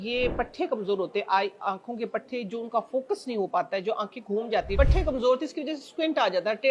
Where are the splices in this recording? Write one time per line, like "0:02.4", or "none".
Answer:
0:04.8